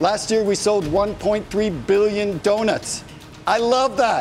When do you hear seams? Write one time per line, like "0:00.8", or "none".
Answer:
none